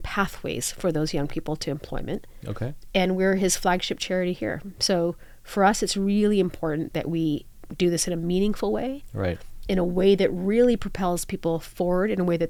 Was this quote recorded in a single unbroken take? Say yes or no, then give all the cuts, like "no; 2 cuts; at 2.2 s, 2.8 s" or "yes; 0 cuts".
yes; 0 cuts